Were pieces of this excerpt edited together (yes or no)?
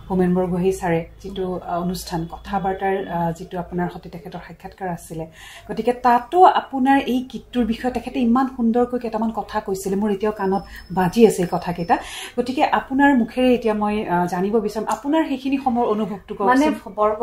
no